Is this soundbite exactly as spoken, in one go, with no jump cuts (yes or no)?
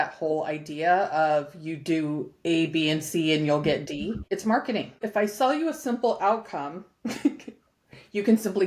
no